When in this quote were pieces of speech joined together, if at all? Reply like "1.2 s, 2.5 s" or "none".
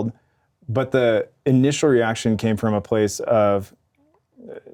none